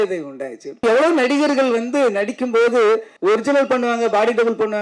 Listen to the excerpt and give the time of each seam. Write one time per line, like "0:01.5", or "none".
0:00.8
0:03.1